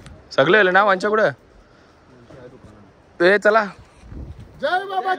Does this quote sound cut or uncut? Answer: uncut